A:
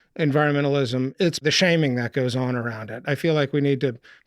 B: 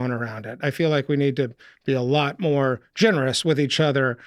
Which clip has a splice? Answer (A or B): A